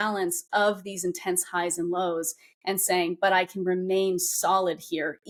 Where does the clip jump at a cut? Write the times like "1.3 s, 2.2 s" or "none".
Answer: none